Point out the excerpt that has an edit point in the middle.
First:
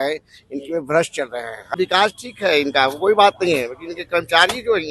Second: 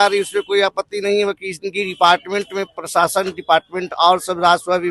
first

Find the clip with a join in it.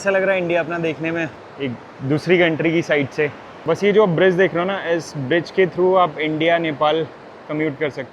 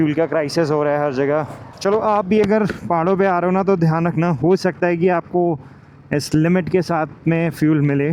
first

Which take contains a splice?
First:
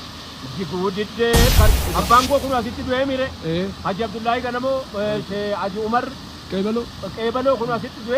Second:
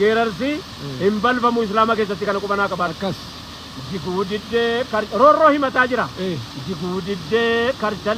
first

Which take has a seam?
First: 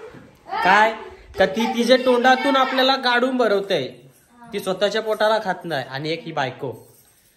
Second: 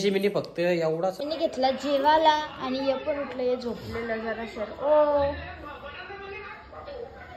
second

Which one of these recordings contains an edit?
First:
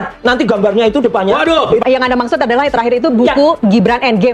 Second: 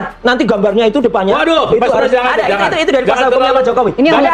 first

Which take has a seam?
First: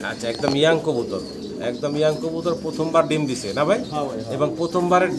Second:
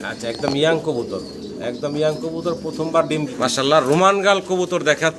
second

